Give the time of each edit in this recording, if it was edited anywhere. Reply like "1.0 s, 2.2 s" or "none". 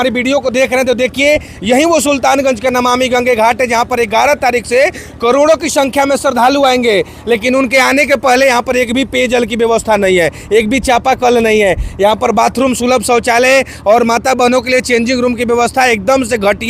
none